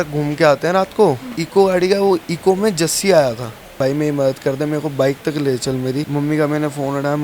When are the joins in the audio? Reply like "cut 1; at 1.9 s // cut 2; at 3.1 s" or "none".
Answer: cut 1; at 1.3 s // cut 2; at 3.8 s // cut 3; at 6.1 s